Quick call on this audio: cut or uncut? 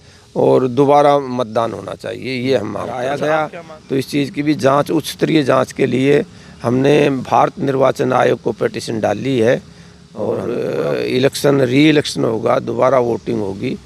cut